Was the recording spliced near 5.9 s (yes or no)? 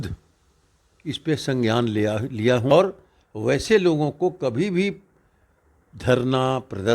no